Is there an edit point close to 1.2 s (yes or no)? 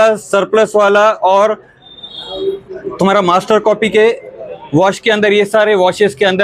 no